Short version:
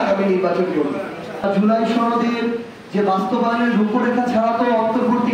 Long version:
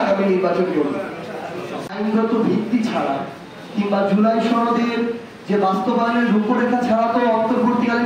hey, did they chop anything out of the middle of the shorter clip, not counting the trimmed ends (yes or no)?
yes